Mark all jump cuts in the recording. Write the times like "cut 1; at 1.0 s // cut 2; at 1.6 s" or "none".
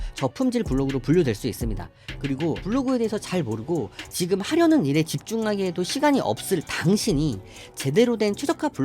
cut 1; at 2.6 s